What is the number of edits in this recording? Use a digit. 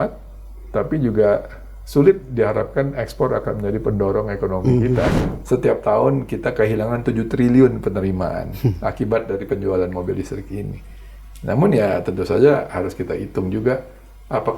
1